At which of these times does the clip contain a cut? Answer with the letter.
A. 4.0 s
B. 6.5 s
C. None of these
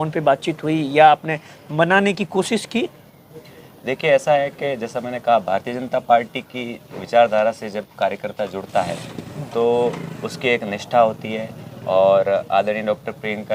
C